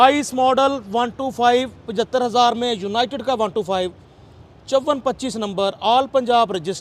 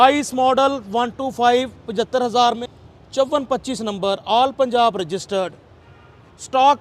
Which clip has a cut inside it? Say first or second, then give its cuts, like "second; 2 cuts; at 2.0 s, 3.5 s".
second; 1 cut; at 2.6 s